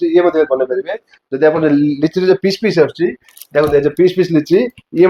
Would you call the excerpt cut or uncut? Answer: uncut